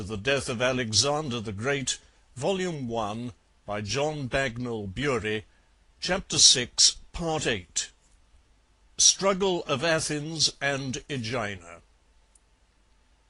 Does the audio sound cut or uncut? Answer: cut